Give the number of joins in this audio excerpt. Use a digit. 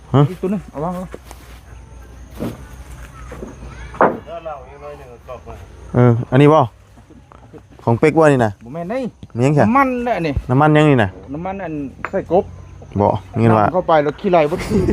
0